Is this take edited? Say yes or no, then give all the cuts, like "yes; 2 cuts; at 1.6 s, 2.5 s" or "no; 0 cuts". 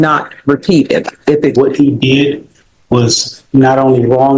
yes; 1 cut; at 1.5 s